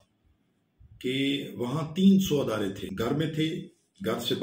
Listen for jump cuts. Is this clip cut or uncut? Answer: cut